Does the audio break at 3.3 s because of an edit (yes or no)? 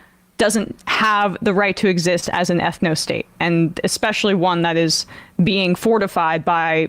yes